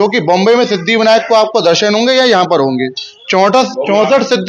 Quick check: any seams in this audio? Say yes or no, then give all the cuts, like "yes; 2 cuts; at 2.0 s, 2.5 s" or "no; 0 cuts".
no; 0 cuts